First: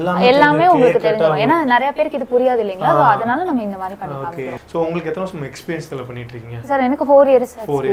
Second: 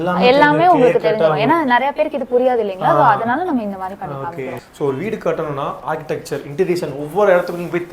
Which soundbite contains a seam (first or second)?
second